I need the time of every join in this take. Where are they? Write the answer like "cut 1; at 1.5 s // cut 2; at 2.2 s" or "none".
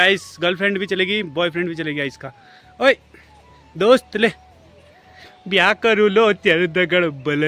none